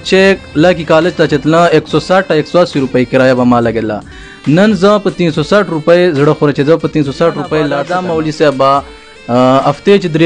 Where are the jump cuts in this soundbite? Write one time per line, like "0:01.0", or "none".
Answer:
0:07.9